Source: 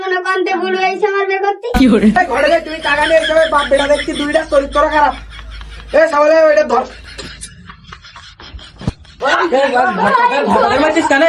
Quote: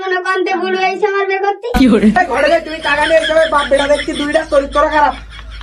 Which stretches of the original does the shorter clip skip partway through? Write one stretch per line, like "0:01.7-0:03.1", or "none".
none